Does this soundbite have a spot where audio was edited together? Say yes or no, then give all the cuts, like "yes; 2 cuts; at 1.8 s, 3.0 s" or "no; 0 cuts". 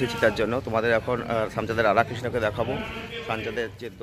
no; 0 cuts